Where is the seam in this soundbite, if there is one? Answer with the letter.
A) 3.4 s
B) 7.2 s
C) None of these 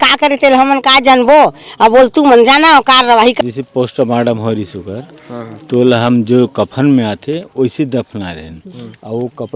A